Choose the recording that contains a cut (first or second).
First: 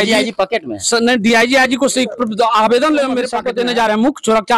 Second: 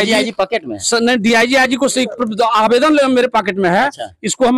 first